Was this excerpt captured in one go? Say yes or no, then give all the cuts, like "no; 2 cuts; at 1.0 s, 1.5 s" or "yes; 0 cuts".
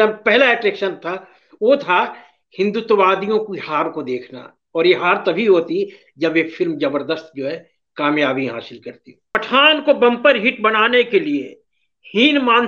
no; 1 cut; at 9.4 s